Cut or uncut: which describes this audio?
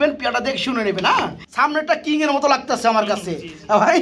cut